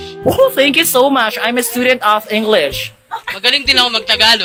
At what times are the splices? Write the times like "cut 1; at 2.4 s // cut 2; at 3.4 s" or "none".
none

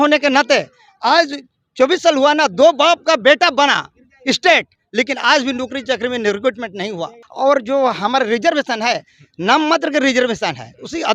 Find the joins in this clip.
cut 1; at 7.2 s

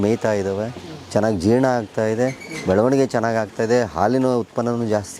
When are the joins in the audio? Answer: none

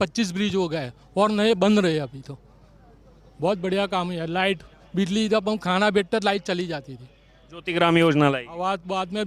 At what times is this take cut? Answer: none

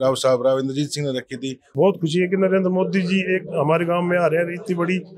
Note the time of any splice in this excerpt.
cut 1; at 1.7 s

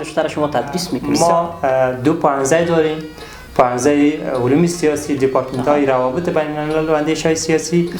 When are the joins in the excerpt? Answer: cut 1; at 1.0 s

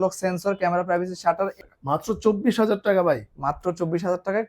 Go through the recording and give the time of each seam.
cut 1; at 1.6 s

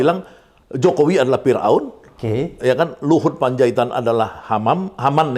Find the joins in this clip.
none

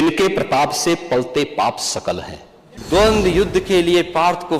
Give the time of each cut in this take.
cut 1; at 2.7 s

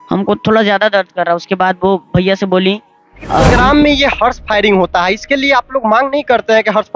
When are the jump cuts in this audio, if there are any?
cut 1; at 3.4 s

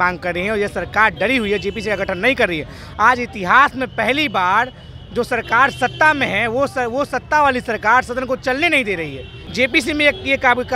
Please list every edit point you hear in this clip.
cut 1; at 9.4 s

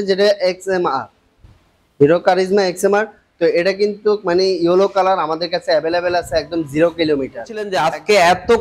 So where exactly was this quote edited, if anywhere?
cut 1; at 7.7 s

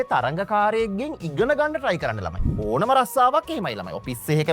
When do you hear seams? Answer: cut 1; at 2.4 s

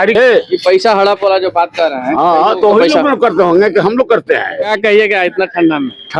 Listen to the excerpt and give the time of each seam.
cut 1; at 4.7 s

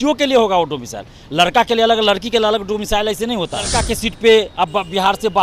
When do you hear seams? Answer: cut 1; at 3.7 s

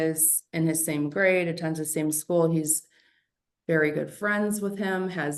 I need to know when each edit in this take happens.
none

